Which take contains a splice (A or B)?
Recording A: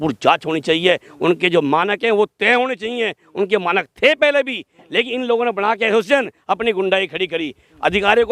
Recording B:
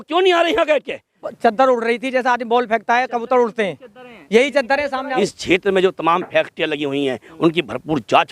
B